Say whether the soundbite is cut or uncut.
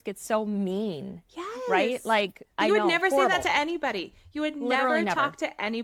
uncut